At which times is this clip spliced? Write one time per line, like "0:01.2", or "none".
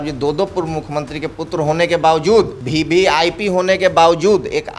0:02.6

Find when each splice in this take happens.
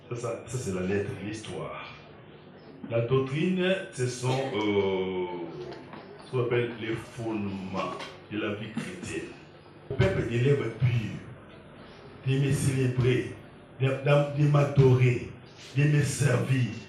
0:09.9

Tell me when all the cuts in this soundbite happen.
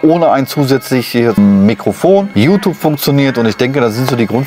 0:01.4
0:02.3

